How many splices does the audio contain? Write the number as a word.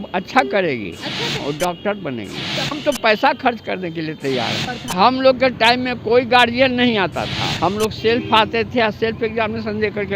four